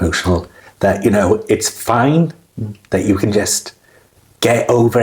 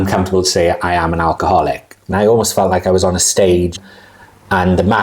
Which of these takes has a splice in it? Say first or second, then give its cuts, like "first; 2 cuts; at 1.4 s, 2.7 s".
second; 2 cuts; at 2.1 s, 3.8 s